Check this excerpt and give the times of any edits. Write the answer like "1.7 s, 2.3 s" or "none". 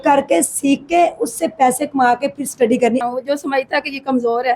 3.0 s